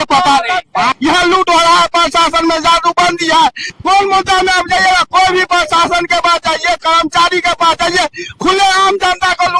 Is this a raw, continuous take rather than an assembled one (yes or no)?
no